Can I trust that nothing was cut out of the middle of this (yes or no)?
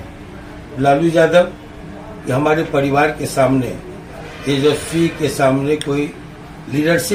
yes